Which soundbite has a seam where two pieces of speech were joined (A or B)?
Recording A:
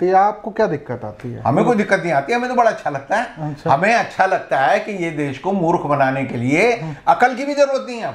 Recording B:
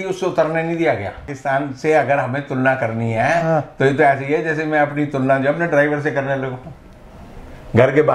B